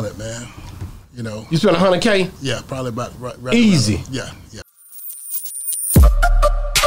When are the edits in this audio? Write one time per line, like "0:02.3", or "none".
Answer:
0:04.6